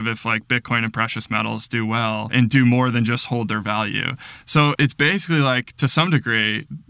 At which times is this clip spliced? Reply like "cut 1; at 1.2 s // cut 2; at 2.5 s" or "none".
cut 1; at 2.3 s // cut 2; at 4.8 s